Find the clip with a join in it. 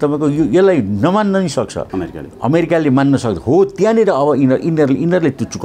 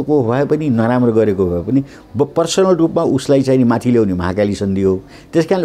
first; 1 cut; at 1.8 s

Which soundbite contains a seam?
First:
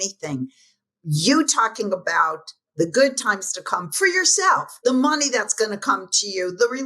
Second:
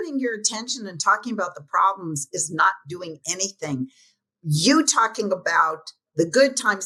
first; 1 cut; at 4.7 s

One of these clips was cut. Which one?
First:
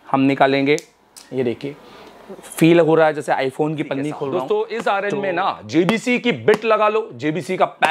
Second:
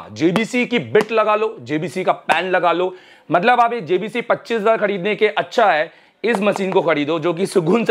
first; 1 cut; at 4.3 s

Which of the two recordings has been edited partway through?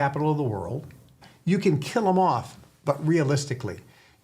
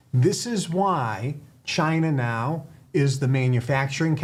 first; 1 cut; at 1.3 s

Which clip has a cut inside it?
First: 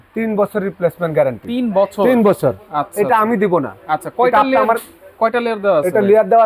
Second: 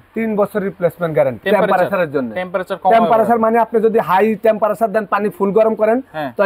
second; 1 cut; at 1.4 s

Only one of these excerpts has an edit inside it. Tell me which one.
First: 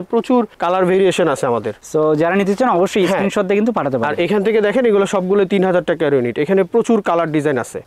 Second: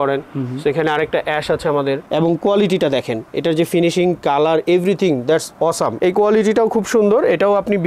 second; 2 cuts; at 2.0 s, 5.9 s

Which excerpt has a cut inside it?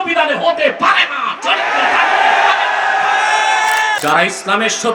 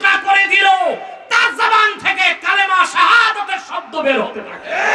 first; 1 cut; at 4.0 s

